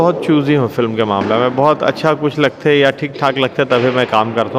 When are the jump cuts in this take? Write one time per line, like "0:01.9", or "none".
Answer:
none